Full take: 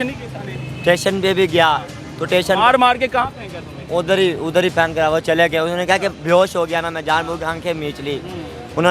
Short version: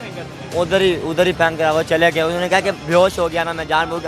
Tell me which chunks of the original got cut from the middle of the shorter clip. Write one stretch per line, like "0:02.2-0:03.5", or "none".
none